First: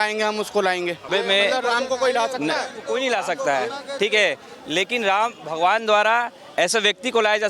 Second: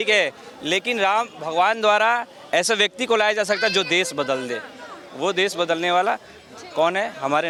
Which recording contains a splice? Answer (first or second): first